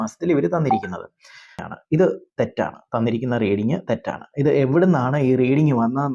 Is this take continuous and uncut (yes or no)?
no